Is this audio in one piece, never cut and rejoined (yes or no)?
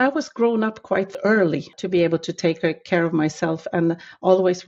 no